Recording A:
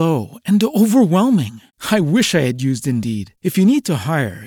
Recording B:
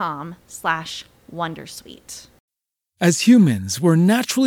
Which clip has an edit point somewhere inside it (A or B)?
B